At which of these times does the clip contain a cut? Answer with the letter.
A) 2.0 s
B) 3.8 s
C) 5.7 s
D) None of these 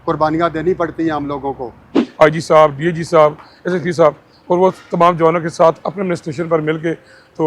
A